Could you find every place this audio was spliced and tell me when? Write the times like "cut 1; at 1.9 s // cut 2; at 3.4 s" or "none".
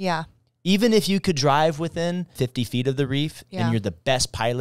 cut 1; at 2.3 s